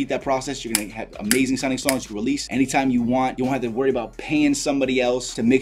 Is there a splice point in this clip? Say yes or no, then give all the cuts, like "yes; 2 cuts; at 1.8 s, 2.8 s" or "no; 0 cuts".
no; 0 cuts